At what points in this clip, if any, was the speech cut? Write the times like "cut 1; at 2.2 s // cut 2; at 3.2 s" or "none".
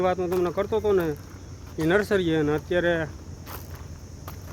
none